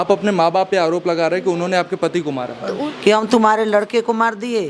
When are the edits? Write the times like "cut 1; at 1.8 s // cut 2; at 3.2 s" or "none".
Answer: cut 1; at 2.8 s